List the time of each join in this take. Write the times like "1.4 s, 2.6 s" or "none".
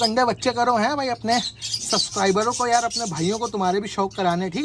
none